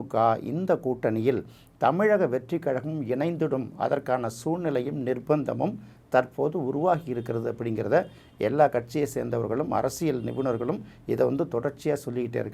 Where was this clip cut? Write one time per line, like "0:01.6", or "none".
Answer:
none